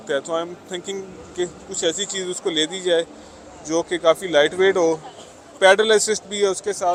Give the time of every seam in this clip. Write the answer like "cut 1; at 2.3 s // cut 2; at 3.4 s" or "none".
none